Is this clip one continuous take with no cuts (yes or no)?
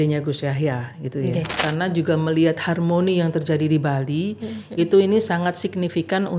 no